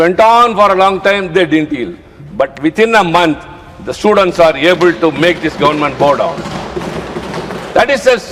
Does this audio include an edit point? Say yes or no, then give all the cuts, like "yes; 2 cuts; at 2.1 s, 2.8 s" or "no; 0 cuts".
no; 0 cuts